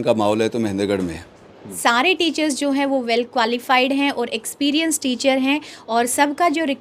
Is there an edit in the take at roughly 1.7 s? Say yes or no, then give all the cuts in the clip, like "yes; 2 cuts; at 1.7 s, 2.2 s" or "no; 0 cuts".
yes; 1 cut; at 1.7 s